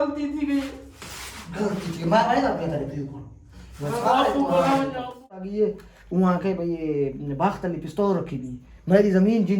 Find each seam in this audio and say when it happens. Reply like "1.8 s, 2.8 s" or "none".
5.4 s